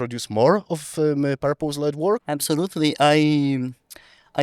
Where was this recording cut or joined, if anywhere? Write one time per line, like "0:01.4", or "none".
0:02.3